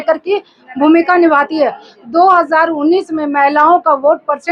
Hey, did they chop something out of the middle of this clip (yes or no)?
no